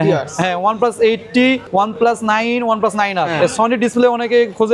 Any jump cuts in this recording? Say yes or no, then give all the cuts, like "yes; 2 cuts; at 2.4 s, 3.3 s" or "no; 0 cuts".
yes; 2 cuts; at 1.6 s, 3.3 s